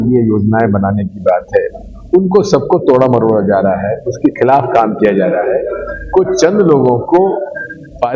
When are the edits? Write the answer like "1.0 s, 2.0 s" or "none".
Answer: none